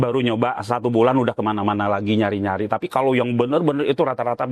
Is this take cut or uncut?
uncut